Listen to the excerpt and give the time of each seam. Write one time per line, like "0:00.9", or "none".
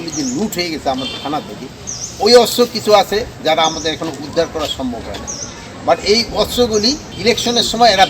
0:07.1